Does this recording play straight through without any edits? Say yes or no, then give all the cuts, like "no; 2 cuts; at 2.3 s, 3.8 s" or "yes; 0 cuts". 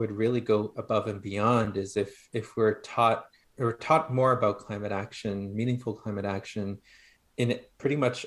yes; 0 cuts